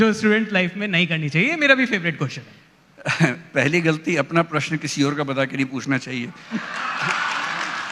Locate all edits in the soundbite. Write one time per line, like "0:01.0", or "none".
none